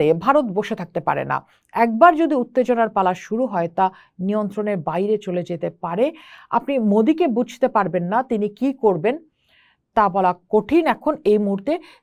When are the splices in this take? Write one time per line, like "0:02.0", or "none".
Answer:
none